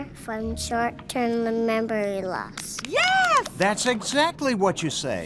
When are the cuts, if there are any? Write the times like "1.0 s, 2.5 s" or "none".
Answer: none